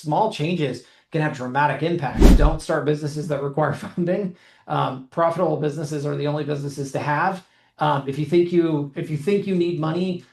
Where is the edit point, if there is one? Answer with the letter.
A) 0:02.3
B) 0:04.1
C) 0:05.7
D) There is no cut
A